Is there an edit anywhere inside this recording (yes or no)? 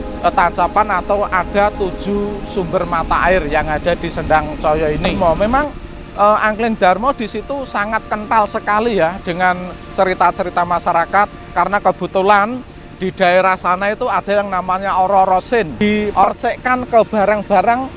yes